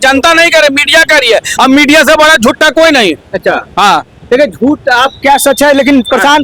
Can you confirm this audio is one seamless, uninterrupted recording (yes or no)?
yes